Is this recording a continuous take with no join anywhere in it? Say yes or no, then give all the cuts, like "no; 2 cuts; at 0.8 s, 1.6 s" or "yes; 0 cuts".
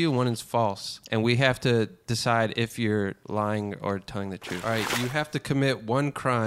no; 3 cuts; at 0.9 s, 3.2 s, 4.6 s